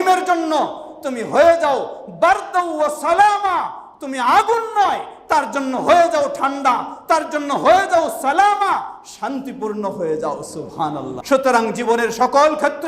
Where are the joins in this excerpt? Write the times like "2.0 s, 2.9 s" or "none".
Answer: 11.1 s